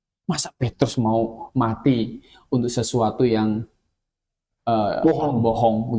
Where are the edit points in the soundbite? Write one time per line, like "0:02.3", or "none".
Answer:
none